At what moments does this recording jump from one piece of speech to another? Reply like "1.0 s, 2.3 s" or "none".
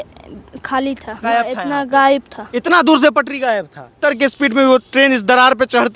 1.1 s, 4.0 s